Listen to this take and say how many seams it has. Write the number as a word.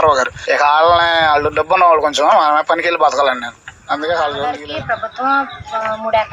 one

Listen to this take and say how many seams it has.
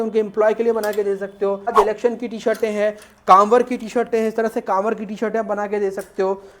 one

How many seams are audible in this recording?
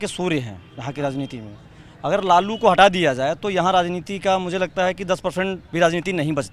one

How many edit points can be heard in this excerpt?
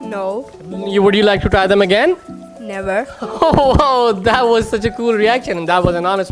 zero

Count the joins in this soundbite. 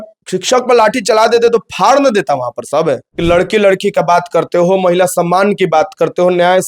one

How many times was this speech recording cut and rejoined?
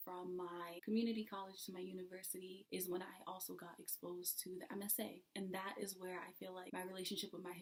zero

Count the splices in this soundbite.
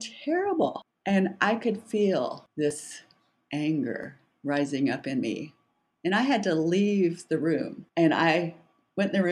three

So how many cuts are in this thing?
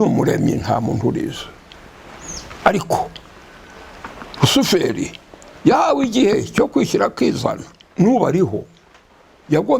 zero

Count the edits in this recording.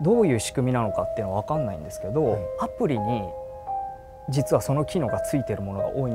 one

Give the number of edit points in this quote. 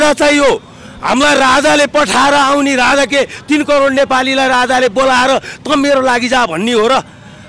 zero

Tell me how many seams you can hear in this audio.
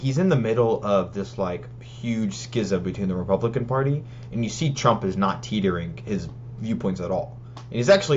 zero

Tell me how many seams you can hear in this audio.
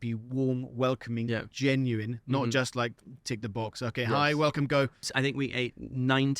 one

